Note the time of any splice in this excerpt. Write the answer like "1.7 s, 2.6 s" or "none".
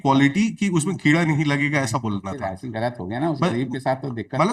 none